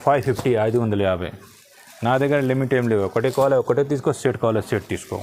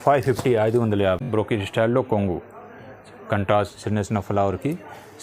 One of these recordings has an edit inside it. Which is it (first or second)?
second